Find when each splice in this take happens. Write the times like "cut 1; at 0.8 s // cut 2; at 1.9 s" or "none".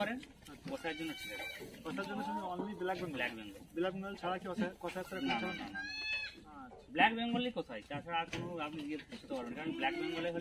none